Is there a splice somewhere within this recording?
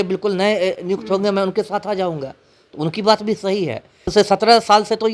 yes; 1 cut; at 4.0 s

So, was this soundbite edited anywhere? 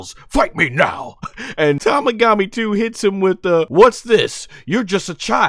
yes; 2 cuts; at 1.8 s, 3.7 s

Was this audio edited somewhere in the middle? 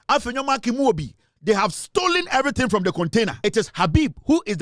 yes; 1 cut; at 3.4 s

